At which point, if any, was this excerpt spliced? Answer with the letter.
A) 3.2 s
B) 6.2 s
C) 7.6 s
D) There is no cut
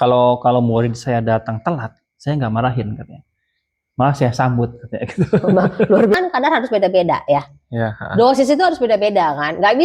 B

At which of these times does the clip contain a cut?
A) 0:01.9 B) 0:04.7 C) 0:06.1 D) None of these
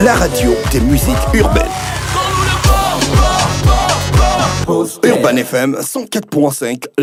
D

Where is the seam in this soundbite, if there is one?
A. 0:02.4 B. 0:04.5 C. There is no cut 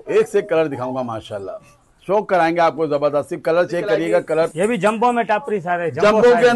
B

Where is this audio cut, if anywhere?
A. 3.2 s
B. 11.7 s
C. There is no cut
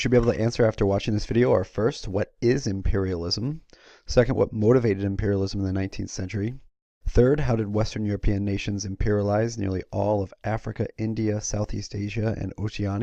A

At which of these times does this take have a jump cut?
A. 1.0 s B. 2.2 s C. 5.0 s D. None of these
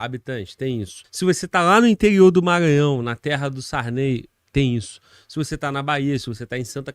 A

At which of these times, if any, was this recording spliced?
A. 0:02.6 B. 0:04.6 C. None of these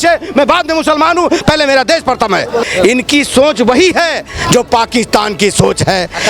A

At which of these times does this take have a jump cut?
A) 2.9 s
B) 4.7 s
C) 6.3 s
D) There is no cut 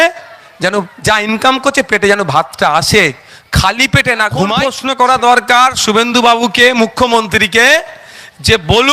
B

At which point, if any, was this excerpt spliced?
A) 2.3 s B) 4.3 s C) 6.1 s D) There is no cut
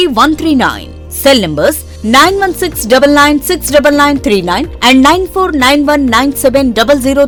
D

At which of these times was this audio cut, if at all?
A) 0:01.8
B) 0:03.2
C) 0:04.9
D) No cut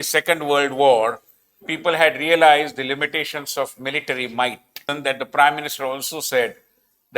C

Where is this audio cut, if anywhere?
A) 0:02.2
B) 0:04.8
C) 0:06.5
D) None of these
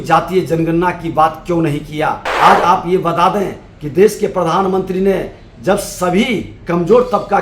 A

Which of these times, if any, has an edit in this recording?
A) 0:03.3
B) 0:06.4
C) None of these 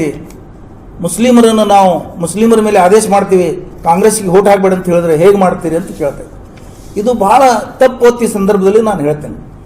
C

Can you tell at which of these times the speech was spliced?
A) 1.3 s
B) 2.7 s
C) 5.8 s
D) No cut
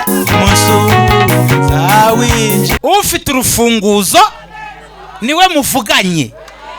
B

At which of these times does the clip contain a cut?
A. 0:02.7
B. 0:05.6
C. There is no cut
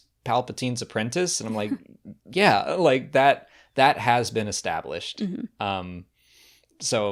C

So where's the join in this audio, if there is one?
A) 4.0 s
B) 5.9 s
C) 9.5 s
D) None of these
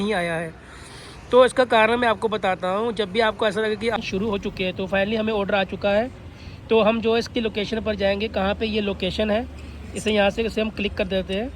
A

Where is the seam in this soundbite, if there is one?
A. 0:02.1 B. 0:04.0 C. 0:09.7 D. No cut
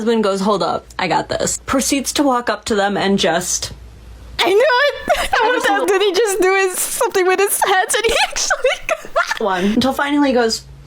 C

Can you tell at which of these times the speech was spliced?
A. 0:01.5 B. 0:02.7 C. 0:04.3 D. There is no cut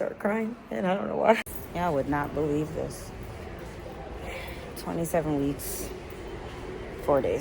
A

